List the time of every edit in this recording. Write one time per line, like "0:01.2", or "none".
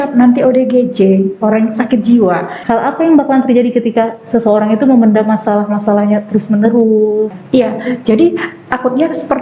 0:02.5
0:07.4